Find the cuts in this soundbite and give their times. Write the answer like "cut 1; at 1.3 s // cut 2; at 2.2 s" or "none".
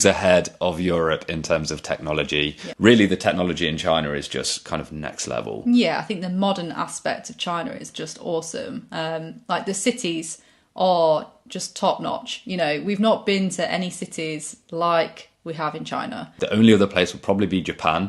cut 1; at 2.6 s // cut 2; at 16.3 s